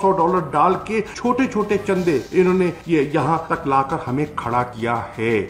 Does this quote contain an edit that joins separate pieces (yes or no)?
yes